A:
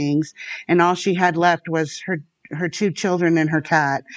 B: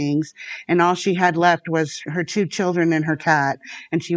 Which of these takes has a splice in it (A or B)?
B